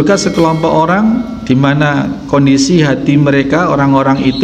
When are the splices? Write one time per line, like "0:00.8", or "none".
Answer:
none